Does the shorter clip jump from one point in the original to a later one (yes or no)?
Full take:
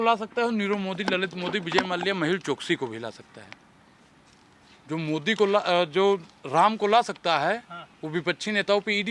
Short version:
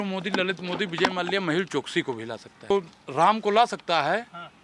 yes